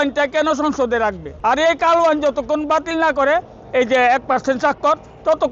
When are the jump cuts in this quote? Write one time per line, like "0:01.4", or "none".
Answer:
0:01.3